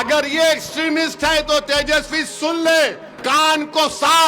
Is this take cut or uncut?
cut